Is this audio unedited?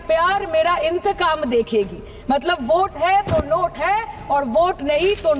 yes; 0 cuts

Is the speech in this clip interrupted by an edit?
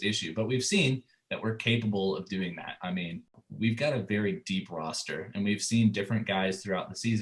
yes; 1 cut; at 3.4 s

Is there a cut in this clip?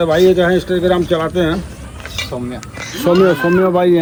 no; 0 cuts

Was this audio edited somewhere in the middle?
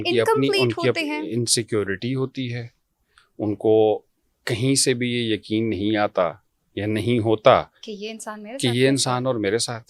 no; 0 cuts

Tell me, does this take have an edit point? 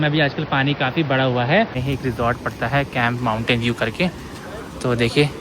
yes; 1 cut; at 1.8 s

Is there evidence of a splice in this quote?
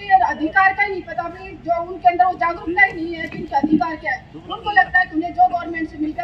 no; 0 cuts

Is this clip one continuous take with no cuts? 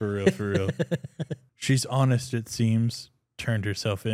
no; 1 cut; at 1.5 s

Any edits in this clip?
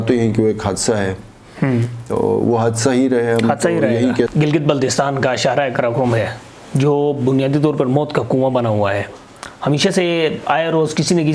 yes; 1 cut; at 4.3 s

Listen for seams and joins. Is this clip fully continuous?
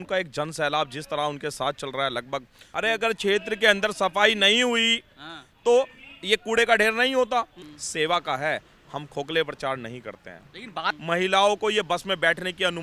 no; 3 cuts; at 2.7 s, 7.6 s, 10.9 s

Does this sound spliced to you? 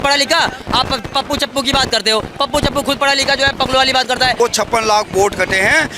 yes; 1 cut; at 4.4 s

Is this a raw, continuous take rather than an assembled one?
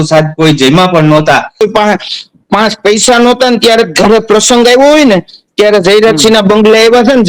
no; 1 cut; at 1.6 s

